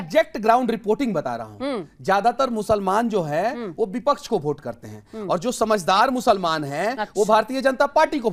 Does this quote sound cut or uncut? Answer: uncut